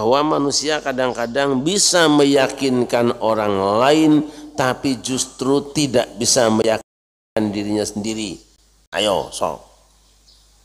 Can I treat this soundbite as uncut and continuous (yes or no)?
yes